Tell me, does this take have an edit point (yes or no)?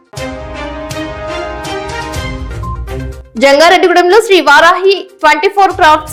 no